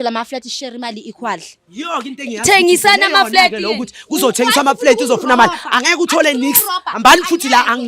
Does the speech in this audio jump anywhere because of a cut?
no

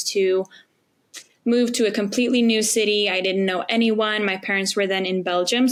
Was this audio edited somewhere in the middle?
no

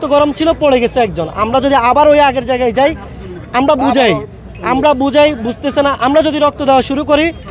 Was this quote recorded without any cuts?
yes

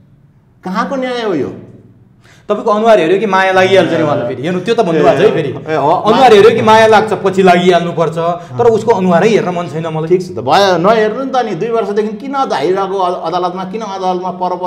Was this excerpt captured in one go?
yes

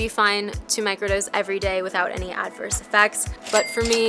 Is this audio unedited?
yes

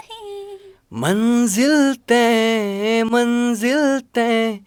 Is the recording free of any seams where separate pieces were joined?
yes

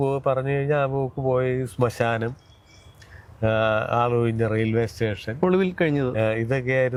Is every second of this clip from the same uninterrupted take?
yes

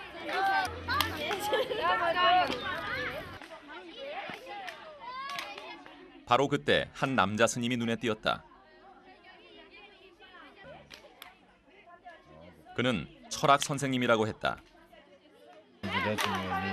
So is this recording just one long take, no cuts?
no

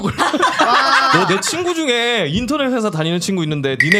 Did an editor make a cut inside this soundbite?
yes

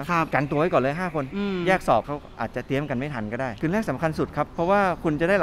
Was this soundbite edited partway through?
yes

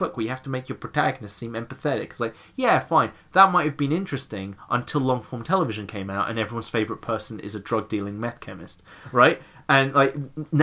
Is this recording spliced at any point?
no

